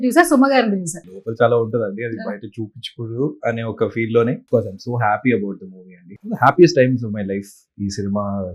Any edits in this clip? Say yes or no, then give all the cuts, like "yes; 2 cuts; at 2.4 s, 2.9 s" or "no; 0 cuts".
yes; 3 cuts; at 1.2 s, 4.4 s, 6.1 s